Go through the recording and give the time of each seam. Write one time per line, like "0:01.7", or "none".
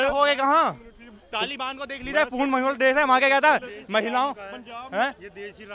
none